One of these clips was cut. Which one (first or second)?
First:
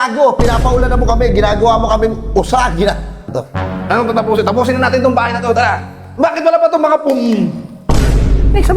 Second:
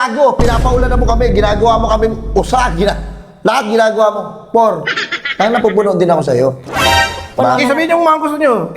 first